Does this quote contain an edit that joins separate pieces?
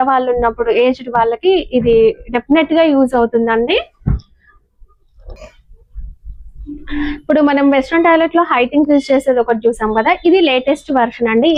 no; 0 cuts

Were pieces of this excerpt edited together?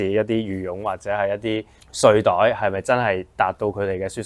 no; 0 cuts

